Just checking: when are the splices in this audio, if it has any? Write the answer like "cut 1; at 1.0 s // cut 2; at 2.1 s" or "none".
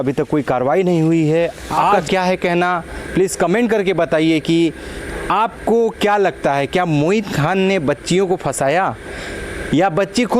cut 1; at 2.0 s